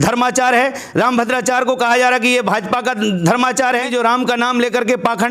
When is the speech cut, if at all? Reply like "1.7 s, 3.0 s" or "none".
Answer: 3.9 s